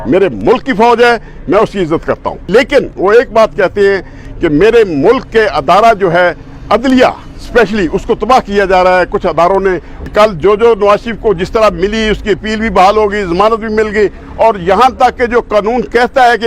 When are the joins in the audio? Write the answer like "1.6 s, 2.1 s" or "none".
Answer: 2.4 s, 9.9 s